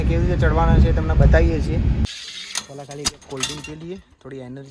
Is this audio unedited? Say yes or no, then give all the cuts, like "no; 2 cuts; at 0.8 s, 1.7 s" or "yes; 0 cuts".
no; 1 cut; at 2.1 s